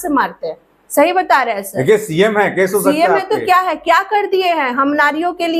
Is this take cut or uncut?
uncut